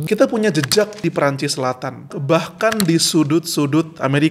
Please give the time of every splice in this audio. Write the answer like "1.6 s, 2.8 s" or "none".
1.0 s, 2.1 s